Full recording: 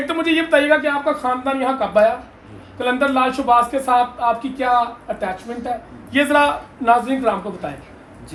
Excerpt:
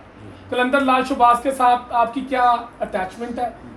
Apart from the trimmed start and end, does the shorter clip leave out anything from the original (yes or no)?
no